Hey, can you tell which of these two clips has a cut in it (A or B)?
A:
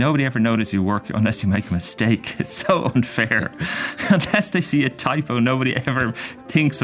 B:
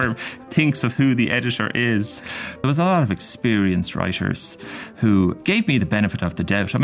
B